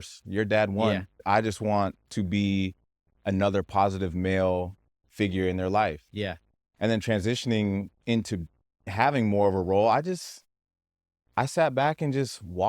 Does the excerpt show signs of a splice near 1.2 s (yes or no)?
yes